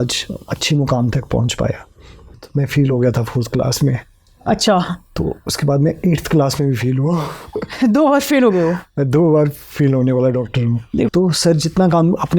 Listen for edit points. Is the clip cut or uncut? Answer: cut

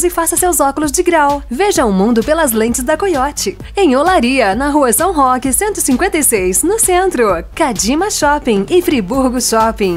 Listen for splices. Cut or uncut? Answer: uncut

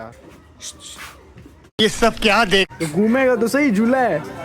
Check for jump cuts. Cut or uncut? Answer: cut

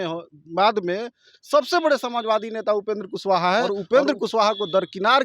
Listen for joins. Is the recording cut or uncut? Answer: cut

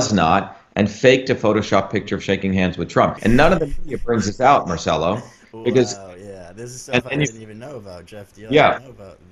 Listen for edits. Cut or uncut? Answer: cut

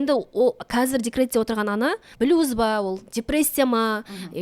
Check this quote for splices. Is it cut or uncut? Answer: cut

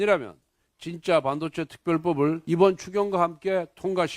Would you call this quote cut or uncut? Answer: cut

